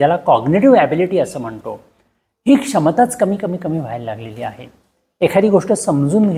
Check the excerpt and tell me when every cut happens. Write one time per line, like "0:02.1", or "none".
none